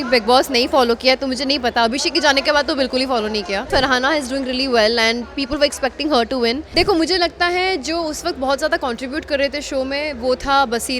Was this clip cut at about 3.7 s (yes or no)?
yes